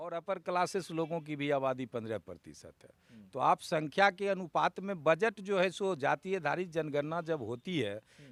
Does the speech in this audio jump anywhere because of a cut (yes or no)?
no